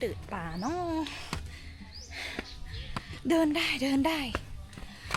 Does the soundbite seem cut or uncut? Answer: uncut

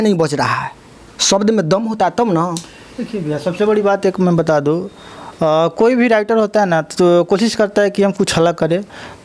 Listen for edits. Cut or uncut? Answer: uncut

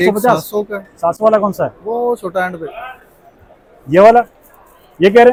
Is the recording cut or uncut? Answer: uncut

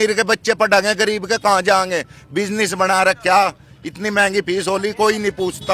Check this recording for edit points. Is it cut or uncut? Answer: uncut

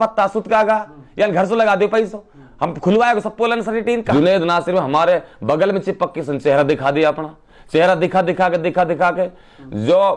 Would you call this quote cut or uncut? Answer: cut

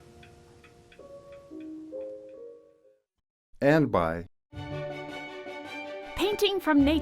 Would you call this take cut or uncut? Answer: cut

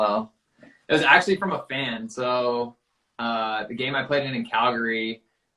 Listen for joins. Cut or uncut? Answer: uncut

